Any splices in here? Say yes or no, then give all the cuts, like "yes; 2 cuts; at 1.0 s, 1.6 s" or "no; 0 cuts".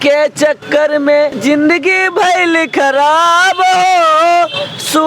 yes; 1 cut; at 1.4 s